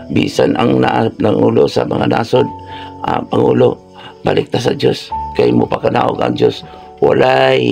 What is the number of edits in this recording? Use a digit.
0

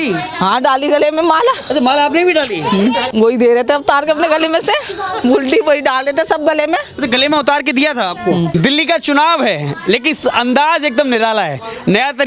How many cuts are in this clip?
2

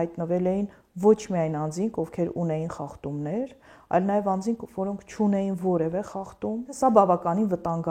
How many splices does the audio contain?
1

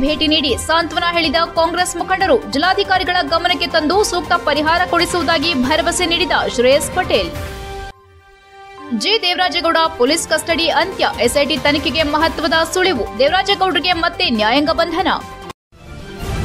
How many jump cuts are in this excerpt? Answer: 1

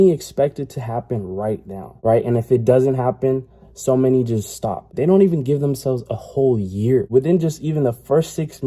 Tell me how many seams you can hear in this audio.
3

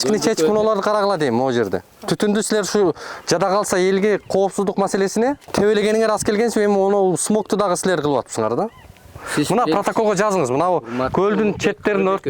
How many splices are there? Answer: 1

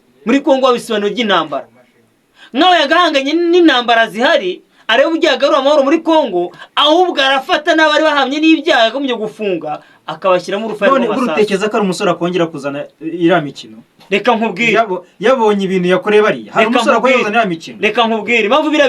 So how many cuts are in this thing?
0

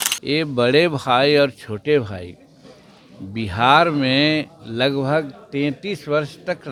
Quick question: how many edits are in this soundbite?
0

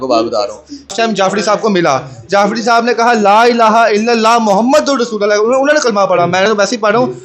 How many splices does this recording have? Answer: 1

